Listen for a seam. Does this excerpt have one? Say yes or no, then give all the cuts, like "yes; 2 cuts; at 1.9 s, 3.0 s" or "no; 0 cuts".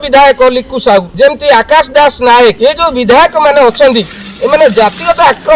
yes; 1 cut; at 1.1 s